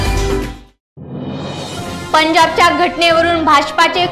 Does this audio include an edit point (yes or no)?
yes